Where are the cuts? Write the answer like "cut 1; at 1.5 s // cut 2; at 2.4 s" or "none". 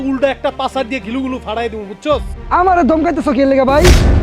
none